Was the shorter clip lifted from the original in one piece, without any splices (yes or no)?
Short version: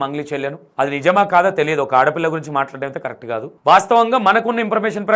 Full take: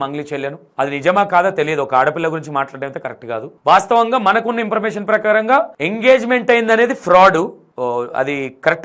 yes